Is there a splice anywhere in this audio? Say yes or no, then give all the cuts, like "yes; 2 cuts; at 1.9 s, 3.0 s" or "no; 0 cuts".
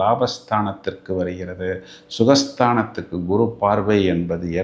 no; 0 cuts